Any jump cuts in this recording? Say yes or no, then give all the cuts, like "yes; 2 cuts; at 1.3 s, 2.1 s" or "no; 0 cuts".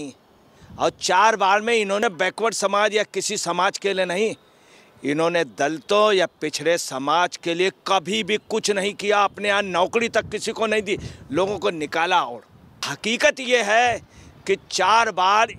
yes; 2 cuts; at 2.0 s, 12.9 s